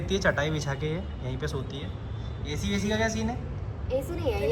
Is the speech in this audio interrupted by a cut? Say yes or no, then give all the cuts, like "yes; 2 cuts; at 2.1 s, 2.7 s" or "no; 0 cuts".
no; 0 cuts